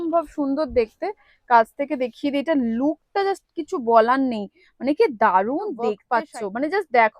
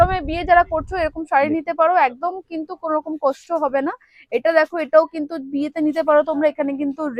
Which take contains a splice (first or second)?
first